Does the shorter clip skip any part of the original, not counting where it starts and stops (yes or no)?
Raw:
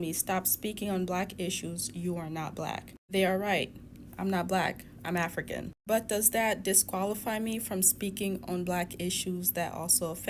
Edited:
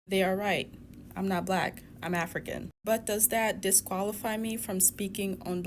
no